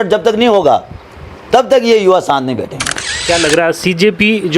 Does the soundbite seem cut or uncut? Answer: uncut